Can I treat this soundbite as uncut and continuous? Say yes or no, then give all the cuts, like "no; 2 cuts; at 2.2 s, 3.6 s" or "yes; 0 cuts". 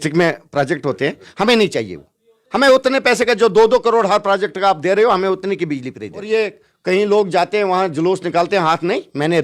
no; 1 cut; at 6.3 s